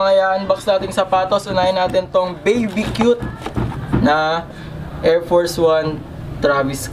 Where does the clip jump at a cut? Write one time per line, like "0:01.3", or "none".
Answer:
none